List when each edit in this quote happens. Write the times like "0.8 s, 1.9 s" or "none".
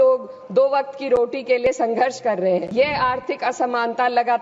2.7 s